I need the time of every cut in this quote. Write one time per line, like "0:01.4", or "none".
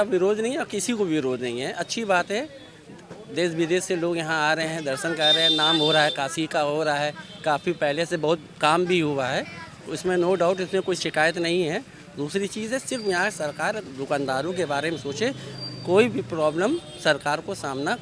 none